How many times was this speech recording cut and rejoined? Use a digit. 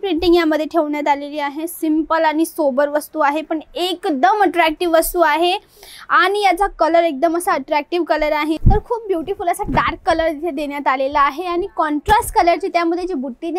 1